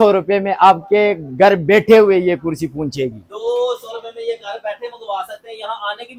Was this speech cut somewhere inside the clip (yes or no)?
no